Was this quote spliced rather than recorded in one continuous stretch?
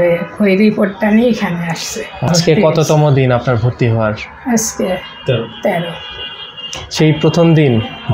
yes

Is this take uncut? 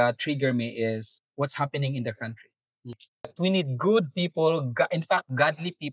no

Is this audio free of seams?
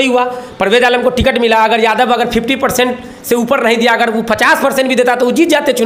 yes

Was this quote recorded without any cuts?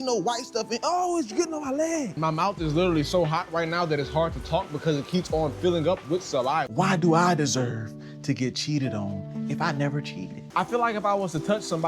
no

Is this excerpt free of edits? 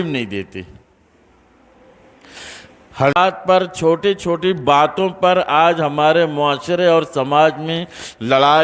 no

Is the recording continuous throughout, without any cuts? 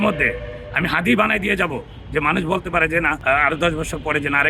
no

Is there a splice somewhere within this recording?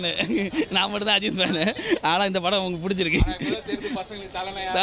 no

